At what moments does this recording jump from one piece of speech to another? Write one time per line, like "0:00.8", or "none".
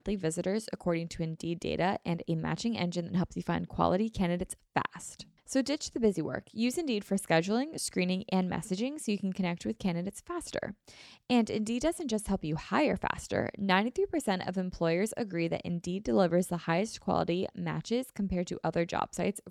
none